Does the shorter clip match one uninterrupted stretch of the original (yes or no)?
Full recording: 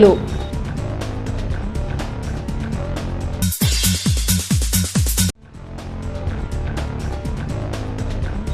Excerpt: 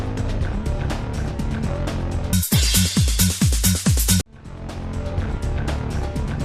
yes